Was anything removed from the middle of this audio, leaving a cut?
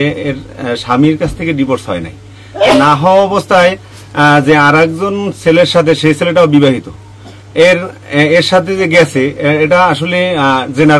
no; 0 cuts

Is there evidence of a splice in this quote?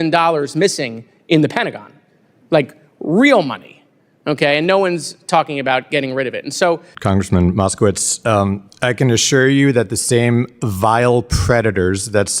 yes; 1 cut; at 6.9 s

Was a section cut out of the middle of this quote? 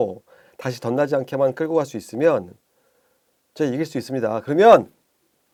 no; 0 cuts

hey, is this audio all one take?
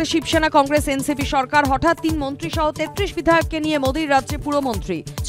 yes; 0 cuts

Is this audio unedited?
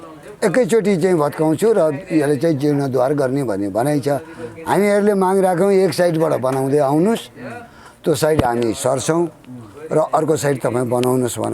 yes; 0 cuts

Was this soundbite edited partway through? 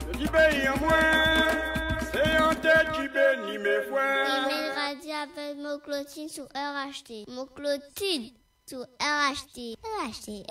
yes; 1 cut; at 4.5 s

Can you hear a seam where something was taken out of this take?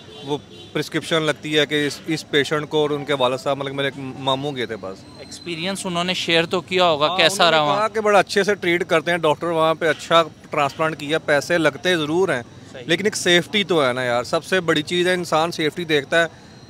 no; 0 cuts

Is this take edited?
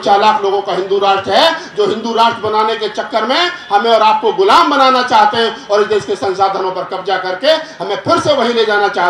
no; 0 cuts

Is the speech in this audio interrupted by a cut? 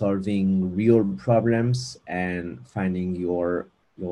no; 0 cuts

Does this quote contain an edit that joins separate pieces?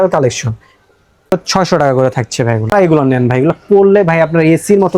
yes; 2 cuts; at 1.3 s, 2.7 s

